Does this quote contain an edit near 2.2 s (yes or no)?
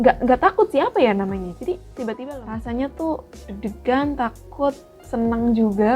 yes